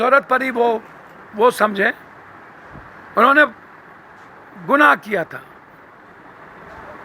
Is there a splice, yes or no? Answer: no